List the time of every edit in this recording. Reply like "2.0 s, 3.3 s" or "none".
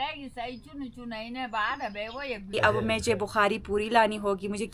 2.5 s